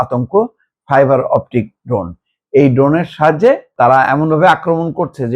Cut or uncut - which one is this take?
cut